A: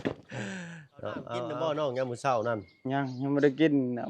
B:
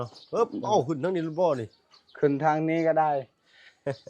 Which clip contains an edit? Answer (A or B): A